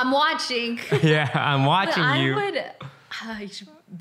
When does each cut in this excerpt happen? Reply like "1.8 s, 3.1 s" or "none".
none